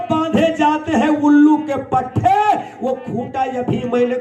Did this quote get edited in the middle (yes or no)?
no